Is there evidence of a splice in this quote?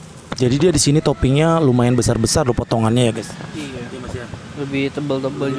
no; 0 cuts

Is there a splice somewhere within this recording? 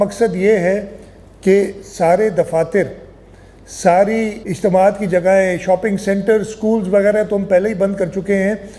yes; 1 cut; at 4.4 s

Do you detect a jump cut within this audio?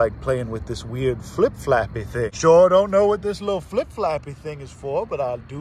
no; 0 cuts

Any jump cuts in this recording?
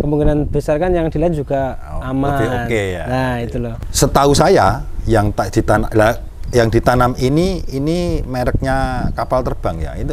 yes; 1 cut; at 3.8 s

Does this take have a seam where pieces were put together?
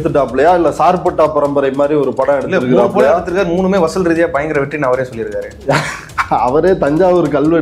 no; 0 cuts

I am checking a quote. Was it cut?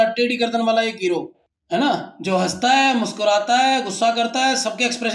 no; 0 cuts

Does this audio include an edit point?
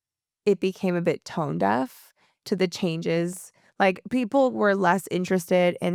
no; 0 cuts

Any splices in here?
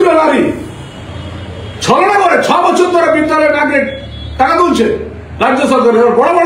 no; 0 cuts

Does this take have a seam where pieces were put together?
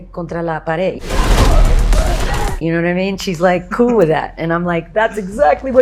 no; 0 cuts

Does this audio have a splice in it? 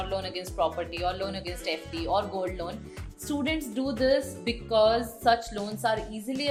no; 0 cuts

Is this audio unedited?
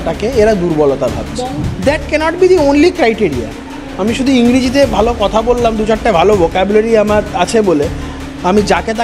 no; 1 cut; at 1.5 s

